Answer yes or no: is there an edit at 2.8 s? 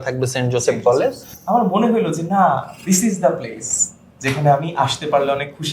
no